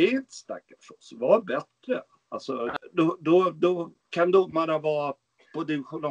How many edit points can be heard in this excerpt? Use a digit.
1